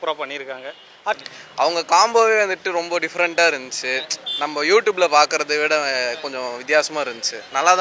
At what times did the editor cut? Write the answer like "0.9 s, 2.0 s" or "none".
1.2 s